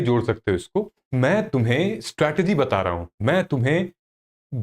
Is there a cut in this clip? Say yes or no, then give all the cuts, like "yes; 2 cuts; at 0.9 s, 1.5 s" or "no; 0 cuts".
yes; 1 cut; at 1.0 s